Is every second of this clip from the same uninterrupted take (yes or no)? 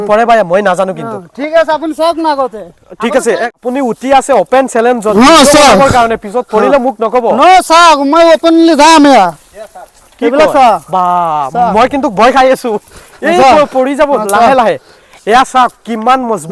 yes